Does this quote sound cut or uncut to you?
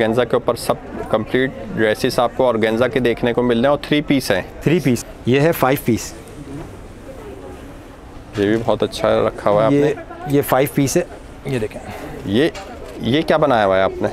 cut